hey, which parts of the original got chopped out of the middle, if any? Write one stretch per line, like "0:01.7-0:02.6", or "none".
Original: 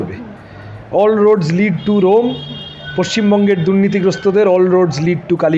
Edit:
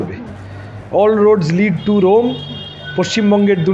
none